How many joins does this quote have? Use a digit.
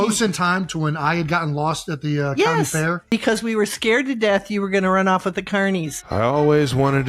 0